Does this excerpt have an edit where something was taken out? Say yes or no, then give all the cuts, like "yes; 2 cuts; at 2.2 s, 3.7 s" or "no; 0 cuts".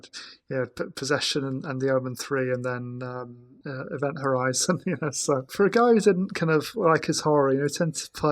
yes; 2 cuts; at 3.6 s, 5.5 s